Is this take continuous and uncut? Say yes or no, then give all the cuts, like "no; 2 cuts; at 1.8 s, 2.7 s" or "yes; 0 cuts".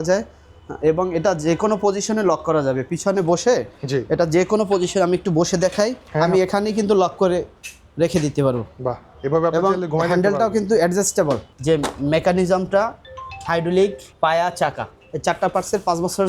no; 3 cuts; at 6.1 s, 11.5 s, 14.0 s